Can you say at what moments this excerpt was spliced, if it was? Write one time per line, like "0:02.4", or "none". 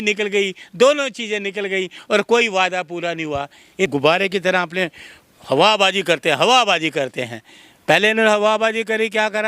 0:03.9